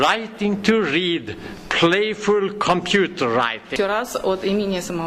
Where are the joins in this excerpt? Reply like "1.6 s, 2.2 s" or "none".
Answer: 3.7 s